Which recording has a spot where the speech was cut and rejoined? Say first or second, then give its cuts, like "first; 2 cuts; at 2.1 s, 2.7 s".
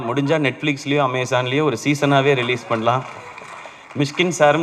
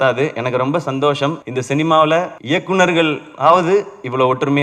second; 2 cuts; at 1.5 s, 2.4 s